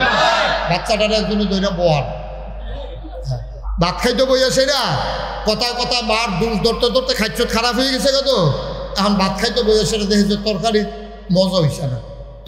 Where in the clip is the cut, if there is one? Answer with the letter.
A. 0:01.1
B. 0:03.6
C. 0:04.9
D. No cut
B